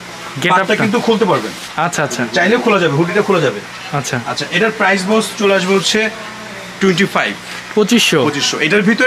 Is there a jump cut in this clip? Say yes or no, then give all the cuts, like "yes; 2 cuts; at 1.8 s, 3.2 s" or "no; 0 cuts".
no; 0 cuts